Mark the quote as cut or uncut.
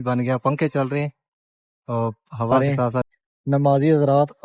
cut